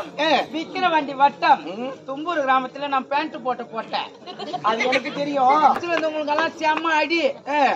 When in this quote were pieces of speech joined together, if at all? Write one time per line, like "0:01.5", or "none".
0:05.8